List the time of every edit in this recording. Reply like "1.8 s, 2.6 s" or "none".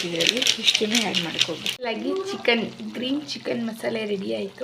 1.7 s

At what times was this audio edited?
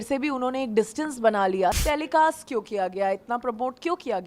1.8 s

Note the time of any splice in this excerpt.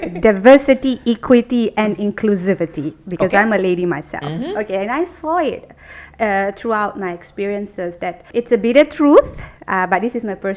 8.2 s

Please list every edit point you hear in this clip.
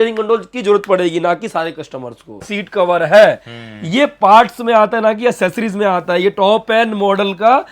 2.6 s

